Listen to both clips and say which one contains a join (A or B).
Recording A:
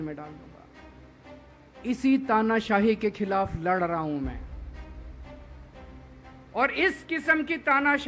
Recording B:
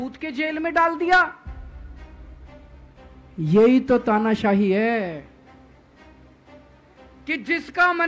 A